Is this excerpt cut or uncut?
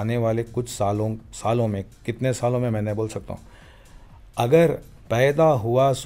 uncut